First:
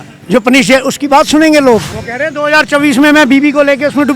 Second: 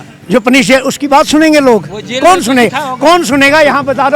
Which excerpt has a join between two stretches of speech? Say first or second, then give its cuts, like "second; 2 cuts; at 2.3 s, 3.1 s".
first; 1 cut; at 2.0 s